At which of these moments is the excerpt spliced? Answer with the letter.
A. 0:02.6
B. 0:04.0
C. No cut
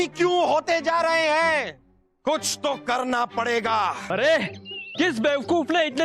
B